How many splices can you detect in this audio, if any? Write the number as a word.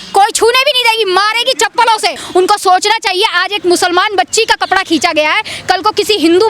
one